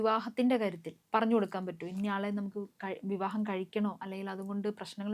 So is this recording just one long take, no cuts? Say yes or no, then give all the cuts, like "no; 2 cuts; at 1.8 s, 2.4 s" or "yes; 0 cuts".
no; 1 cut; at 0.9 s